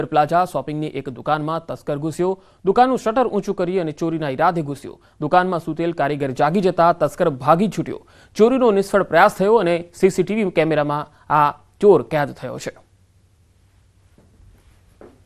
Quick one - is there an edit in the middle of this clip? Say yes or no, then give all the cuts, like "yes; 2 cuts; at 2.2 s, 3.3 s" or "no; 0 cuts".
no; 0 cuts